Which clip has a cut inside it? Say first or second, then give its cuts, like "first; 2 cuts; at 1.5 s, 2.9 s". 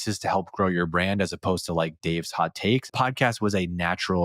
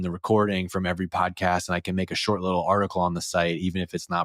first; 1 cut; at 2.9 s